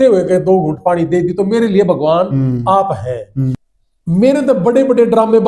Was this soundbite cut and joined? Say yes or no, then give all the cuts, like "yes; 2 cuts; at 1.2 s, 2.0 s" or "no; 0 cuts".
yes; 1 cut; at 3.6 s